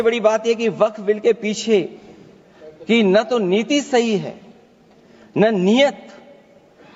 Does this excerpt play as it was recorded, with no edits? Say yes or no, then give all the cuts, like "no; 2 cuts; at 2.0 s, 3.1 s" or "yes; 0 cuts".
yes; 0 cuts